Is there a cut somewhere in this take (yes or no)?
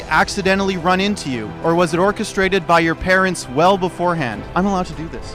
yes